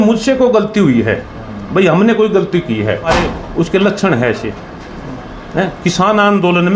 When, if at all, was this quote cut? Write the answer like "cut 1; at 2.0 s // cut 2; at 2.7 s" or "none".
cut 1; at 3.1 s